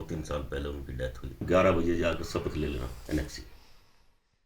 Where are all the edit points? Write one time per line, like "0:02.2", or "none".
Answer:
0:01.4